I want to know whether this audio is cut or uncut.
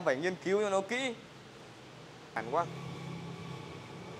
cut